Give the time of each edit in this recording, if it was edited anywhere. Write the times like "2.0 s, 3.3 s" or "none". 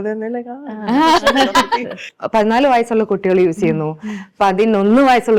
2.1 s